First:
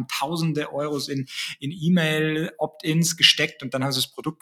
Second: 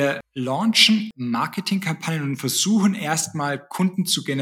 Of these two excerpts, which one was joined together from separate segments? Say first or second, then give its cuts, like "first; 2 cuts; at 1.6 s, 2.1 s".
second; 1 cut; at 1.1 s